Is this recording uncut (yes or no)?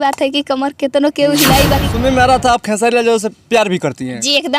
no